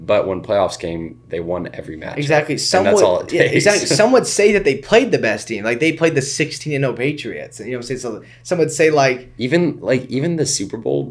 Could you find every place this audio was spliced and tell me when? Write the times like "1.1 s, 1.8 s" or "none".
none